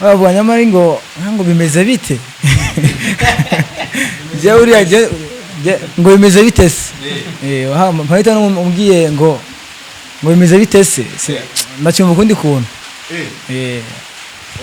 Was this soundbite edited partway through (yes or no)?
no